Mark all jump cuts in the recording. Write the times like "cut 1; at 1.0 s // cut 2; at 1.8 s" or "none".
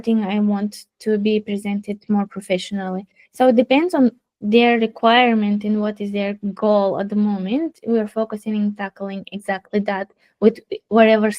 none